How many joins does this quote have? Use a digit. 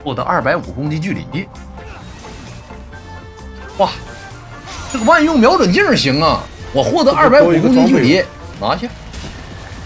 1